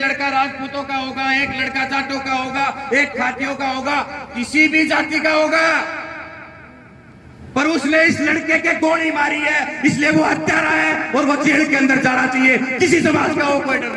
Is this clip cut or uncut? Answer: uncut